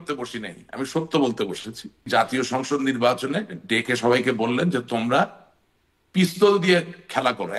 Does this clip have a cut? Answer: yes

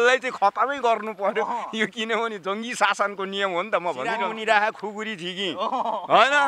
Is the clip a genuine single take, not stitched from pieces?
no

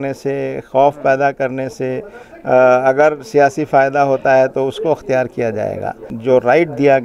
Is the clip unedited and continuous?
no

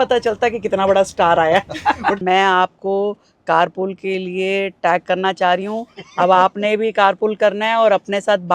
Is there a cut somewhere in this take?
yes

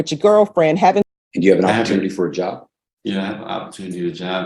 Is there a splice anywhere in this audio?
yes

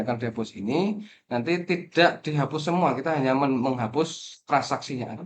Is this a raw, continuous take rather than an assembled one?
yes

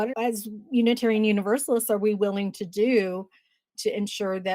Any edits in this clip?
no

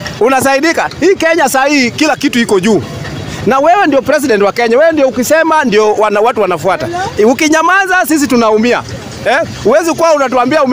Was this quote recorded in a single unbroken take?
yes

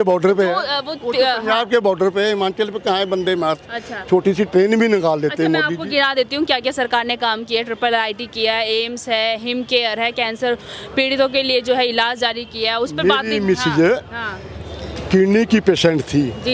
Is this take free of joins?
yes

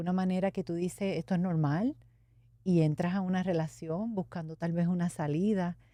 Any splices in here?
no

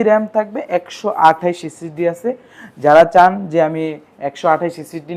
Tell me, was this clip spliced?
no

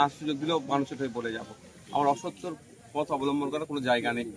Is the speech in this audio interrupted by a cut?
no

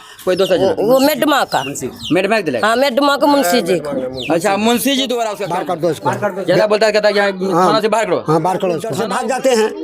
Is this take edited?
yes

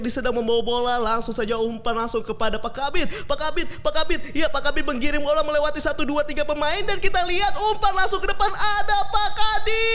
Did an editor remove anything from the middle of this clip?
no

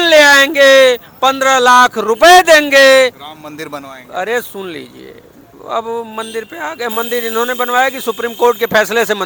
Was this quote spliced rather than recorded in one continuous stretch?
no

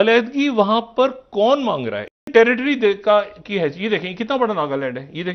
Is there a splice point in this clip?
yes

